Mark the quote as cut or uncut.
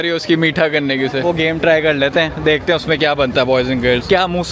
cut